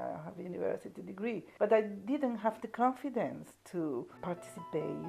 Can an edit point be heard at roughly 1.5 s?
yes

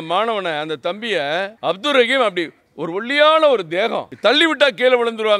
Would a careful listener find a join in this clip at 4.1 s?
yes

